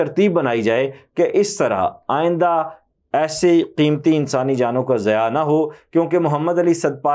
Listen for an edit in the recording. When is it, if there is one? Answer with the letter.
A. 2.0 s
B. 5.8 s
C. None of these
C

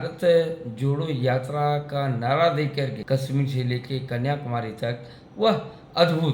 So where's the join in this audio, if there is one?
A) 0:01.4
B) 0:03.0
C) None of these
B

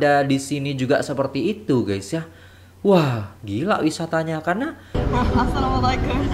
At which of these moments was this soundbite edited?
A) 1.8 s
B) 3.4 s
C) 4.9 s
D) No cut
C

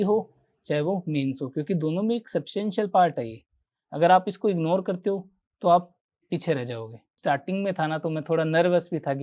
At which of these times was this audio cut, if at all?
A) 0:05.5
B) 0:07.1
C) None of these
B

